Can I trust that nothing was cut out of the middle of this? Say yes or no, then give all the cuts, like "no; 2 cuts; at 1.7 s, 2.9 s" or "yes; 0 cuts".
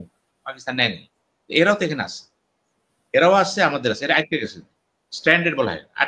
yes; 0 cuts